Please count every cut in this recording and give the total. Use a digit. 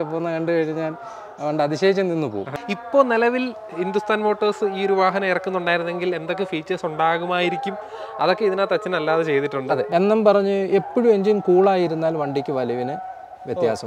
2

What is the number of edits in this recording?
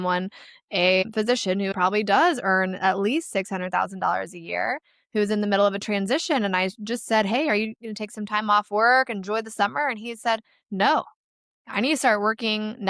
1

